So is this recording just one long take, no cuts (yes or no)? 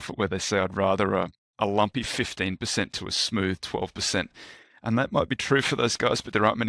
yes